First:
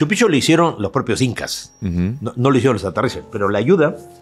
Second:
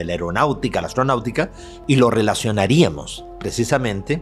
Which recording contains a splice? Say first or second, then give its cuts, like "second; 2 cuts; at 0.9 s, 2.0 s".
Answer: second; 1 cut; at 1.7 s